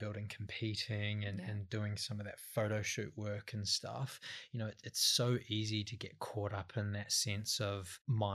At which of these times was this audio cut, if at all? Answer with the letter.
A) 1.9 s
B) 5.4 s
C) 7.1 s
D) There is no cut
D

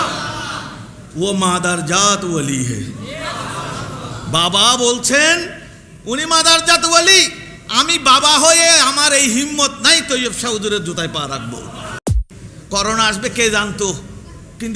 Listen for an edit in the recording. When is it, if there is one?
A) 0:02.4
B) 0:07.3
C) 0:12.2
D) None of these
C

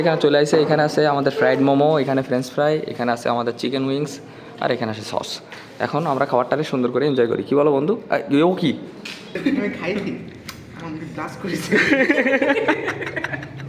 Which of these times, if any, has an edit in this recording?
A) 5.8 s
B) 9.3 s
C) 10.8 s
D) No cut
B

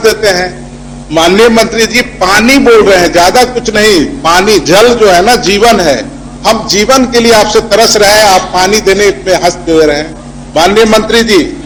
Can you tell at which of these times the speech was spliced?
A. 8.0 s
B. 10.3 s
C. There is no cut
C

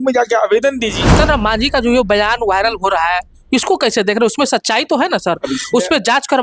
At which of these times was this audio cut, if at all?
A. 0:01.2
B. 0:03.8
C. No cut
A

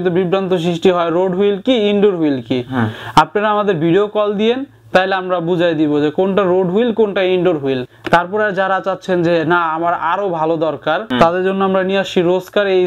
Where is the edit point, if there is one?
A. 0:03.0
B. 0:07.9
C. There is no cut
B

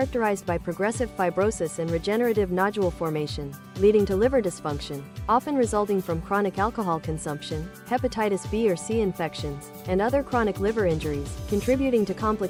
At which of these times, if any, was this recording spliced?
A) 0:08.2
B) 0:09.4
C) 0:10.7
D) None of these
D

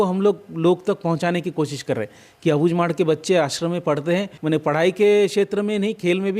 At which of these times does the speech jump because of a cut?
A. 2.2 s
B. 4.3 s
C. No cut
B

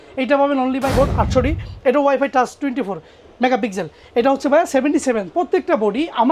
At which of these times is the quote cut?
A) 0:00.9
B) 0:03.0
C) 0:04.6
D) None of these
A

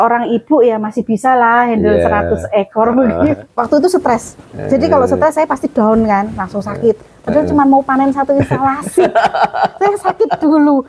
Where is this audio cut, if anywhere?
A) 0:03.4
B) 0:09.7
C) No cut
A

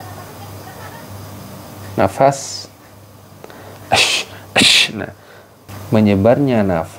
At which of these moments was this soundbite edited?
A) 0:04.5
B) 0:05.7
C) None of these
B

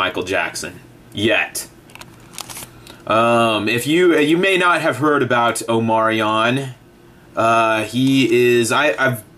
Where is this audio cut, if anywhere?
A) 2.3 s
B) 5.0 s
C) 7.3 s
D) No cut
B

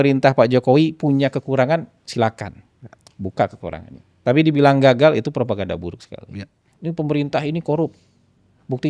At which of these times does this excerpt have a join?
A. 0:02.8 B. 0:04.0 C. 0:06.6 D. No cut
C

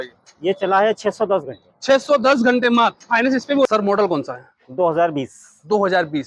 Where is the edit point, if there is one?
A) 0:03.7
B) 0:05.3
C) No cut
A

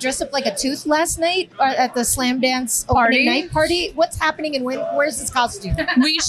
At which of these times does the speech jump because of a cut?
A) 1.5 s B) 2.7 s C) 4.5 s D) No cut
A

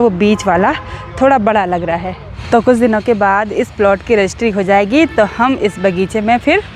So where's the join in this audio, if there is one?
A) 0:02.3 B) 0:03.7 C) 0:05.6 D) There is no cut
A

